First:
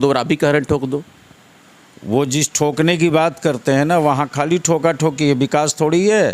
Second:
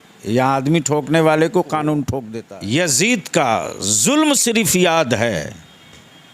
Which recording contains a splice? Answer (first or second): second